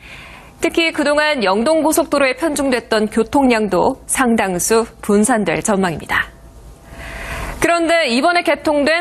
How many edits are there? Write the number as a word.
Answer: one